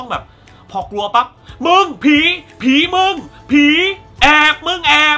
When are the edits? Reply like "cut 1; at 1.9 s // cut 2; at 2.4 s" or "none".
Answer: none